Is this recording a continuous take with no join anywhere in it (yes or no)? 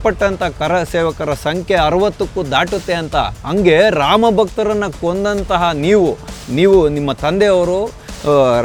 yes